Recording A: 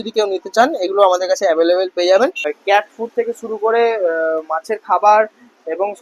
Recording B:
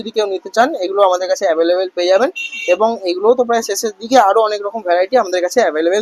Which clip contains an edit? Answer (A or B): A